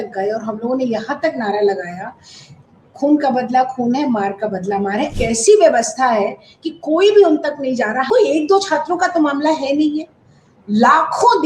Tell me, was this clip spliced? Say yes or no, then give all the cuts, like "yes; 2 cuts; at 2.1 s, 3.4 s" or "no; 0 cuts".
yes; 2 cuts; at 5.1 s, 8.1 s